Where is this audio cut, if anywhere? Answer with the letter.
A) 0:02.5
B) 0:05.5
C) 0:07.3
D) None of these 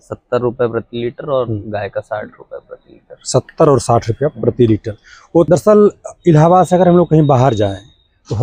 B